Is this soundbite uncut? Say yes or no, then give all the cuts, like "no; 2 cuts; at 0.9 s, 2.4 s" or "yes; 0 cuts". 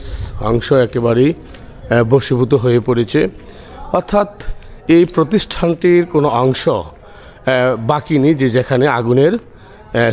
yes; 0 cuts